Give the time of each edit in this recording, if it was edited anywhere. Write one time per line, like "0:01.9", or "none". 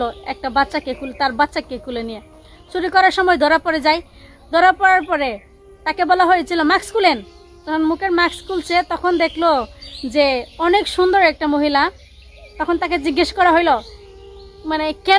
none